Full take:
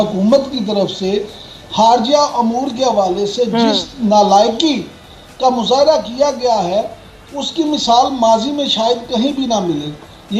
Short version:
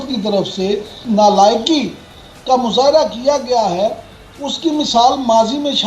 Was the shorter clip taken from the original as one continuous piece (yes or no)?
no